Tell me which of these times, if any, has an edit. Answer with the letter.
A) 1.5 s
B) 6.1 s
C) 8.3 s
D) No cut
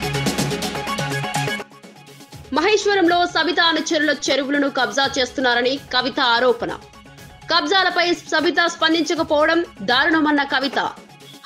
A